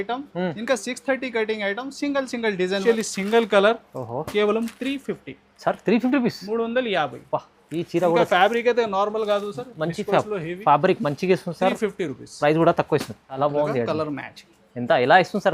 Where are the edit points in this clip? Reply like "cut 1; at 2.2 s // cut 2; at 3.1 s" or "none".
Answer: cut 1; at 2.8 s // cut 2; at 13.4 s